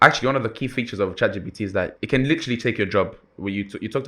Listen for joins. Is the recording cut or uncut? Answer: cut